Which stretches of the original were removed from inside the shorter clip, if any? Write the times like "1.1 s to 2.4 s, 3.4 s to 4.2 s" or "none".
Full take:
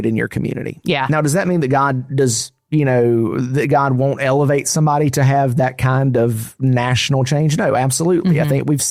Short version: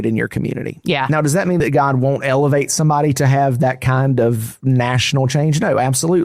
1.6 s to 3.6 s

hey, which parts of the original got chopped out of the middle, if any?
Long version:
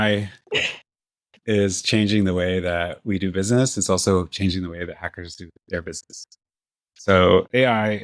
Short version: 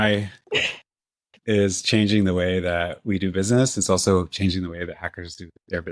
none

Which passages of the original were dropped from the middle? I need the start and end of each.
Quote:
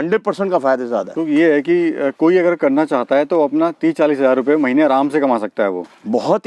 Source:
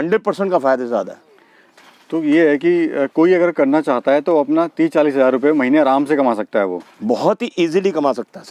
1.1 s to 2.1 s

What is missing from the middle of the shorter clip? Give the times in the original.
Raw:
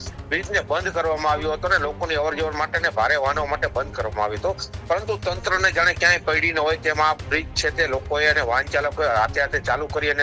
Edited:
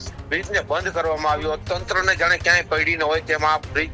1.6 s to 5.2 s

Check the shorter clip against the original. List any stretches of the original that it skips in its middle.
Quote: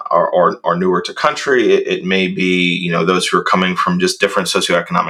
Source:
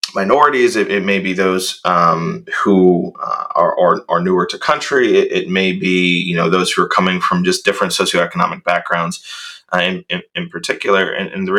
none

